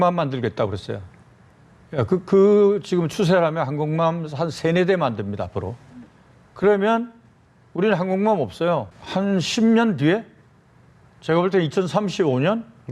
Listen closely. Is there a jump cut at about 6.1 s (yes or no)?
no